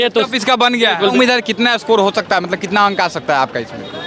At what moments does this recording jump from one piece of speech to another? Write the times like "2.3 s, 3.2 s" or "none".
1.1 s